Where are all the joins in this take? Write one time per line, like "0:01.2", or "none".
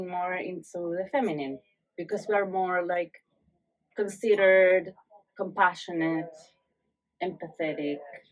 none